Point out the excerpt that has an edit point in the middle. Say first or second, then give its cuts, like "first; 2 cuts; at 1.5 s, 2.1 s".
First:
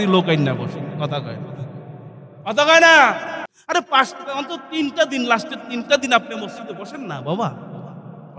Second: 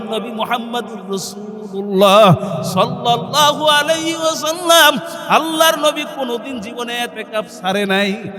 first; 1 cut; at 3.5 s